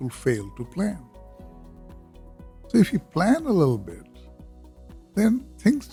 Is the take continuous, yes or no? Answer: yes